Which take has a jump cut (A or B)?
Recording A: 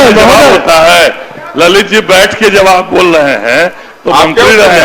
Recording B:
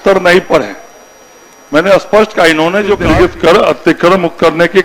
B